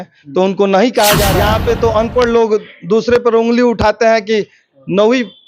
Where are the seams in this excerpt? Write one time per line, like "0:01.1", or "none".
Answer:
0:01.4